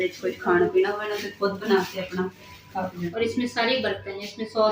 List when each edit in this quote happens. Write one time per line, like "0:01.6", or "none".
0:03.0